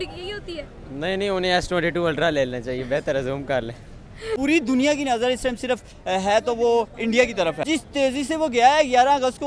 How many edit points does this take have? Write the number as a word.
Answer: two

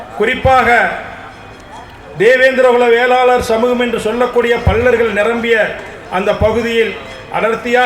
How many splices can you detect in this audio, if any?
zero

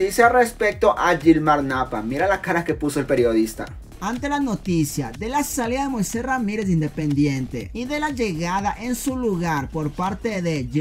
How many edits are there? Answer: zero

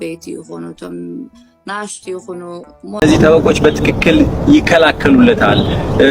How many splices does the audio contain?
one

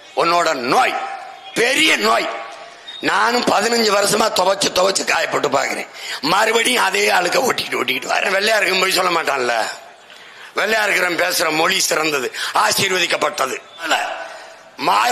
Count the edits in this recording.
two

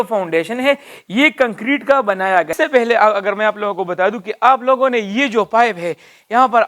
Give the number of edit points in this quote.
one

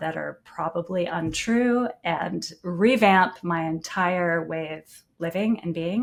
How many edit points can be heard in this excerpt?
zero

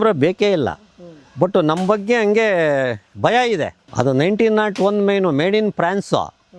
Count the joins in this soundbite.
one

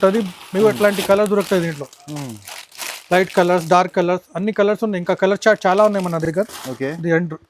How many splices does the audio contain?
zero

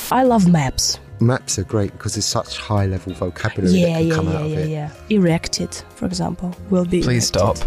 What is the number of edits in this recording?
zero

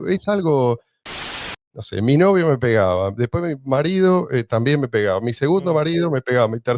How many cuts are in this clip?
one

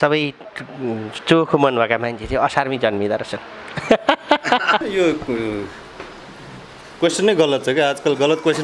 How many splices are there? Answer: one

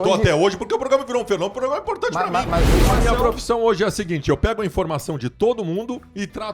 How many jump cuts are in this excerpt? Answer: one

